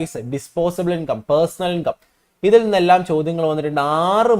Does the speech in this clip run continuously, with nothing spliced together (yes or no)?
yes